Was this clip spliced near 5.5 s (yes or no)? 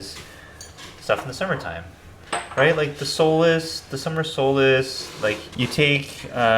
yes